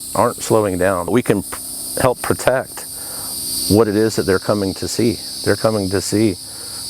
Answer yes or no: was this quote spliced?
yes